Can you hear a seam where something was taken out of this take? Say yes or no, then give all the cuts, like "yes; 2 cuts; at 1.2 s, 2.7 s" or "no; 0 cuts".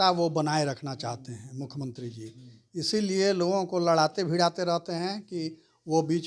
no; 0 cuts